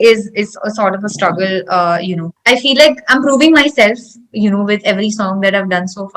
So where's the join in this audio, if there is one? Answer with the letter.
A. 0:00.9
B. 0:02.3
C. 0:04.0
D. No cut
B